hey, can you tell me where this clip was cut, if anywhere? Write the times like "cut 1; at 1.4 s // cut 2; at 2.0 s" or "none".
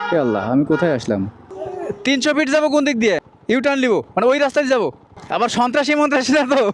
none